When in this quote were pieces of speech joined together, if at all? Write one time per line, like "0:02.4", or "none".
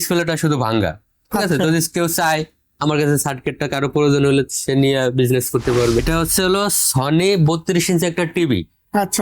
0:06.0